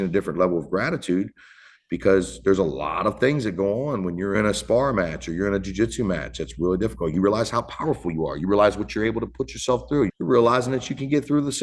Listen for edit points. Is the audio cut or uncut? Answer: cut